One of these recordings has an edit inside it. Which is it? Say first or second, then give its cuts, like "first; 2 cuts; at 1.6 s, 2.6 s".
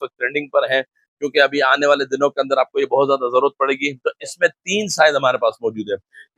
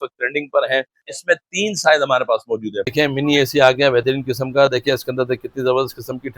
second; 2 cuts; at 1.1 s, 2.8 s